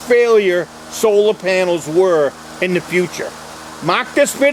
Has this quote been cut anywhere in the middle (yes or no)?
no